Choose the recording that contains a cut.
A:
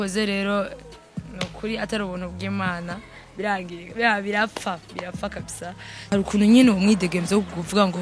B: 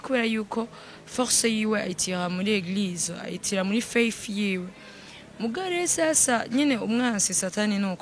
A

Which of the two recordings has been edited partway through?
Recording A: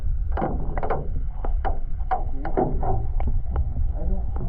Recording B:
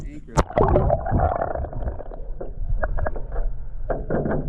A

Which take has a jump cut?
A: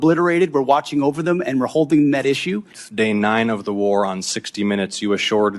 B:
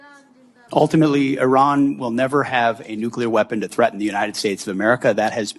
A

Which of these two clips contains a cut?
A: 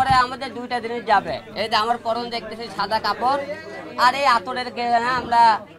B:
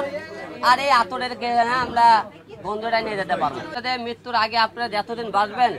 B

